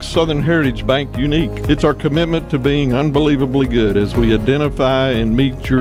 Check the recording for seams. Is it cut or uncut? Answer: uncut